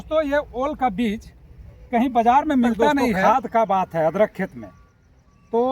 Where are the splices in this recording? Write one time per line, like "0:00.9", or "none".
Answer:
0:03.2